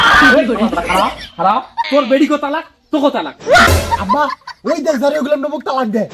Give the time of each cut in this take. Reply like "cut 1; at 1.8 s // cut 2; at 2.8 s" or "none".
cut 1; at 1.9 s // cut 2; at 3.7 s